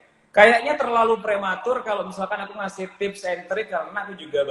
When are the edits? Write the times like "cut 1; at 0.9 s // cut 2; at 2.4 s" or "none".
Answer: none